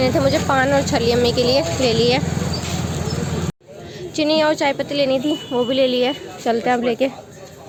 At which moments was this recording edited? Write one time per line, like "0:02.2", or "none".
none